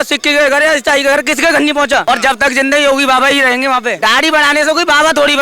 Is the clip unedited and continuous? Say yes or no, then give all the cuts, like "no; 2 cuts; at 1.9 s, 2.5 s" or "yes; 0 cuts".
no; 2 cuts; at 2.0 s, 4.0 s